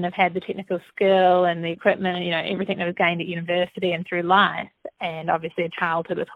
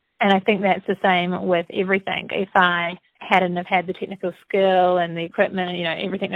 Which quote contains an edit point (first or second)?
second